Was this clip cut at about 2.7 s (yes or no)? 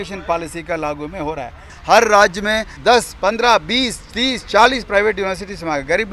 yes